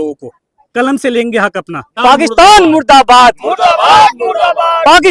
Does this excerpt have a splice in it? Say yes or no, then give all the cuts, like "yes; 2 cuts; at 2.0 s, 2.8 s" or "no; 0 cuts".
yes; 1 cut; at 1.9 s